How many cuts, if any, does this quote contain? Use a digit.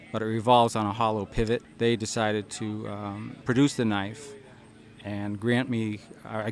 2